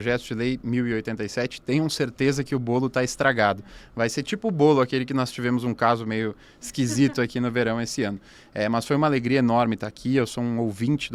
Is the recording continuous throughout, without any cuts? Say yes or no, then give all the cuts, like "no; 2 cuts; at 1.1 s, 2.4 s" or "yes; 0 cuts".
yes; 0 cuts